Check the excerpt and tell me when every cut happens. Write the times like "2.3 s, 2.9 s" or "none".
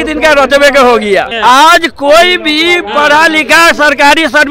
1.3 s